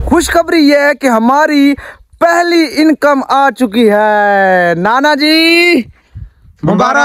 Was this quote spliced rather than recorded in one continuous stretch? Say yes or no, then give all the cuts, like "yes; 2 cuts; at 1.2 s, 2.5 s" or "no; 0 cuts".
no; 0 cuts